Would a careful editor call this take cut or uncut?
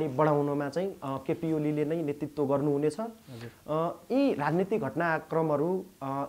uncut